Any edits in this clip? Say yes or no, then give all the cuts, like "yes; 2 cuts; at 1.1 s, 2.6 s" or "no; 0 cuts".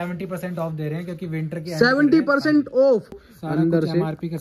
yes; 1 cut; at 3.3 s